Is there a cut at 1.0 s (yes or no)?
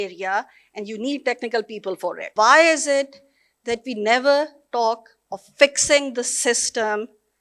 no